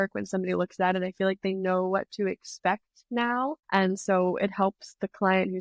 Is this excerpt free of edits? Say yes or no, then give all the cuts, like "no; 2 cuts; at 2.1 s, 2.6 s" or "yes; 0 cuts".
yes; 0 cuts